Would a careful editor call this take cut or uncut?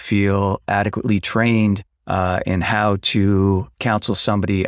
uncut